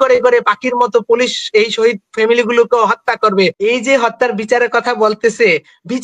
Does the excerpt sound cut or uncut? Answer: cut